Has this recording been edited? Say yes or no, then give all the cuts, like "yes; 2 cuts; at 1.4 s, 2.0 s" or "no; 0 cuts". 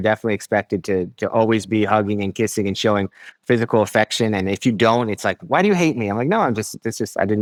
no; 0 cuts